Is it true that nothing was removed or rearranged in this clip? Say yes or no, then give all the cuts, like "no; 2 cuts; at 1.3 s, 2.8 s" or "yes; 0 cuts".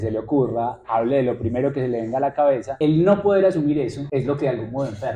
no; 2 cuts; at 2.7 s, 3.8 s